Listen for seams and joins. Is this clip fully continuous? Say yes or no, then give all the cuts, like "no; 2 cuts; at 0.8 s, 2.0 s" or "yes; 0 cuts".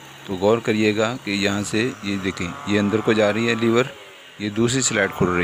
yes; 0 cuts